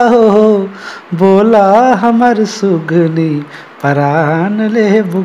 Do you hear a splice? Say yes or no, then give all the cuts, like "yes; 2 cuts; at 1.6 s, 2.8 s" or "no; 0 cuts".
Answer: no; 0 cuts